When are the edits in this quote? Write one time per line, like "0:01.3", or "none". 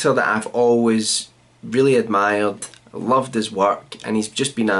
0:01.9